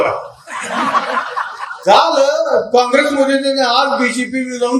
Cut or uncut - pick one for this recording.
cut